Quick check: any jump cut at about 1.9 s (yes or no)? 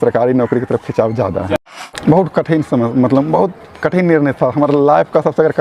yes